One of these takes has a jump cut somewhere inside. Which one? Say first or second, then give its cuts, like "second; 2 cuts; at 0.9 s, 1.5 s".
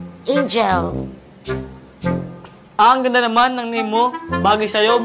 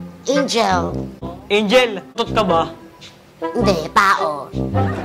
second; 2 cuts; at 1.3 s, 2.2 s